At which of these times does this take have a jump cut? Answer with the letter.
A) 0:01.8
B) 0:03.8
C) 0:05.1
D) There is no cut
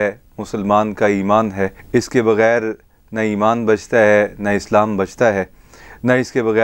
A